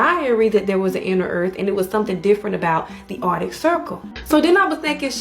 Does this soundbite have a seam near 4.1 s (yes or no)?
yes